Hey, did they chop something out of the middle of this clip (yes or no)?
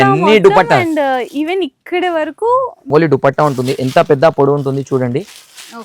yes